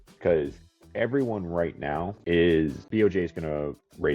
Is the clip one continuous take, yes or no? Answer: no